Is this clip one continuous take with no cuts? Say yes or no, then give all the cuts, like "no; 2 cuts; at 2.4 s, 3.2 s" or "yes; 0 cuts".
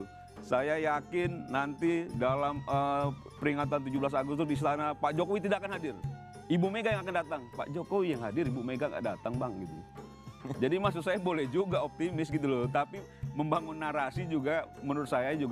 yes; 0 cuts